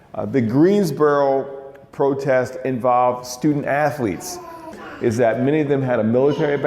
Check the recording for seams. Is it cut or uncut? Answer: cut